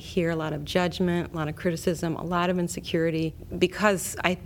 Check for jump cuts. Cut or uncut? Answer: cut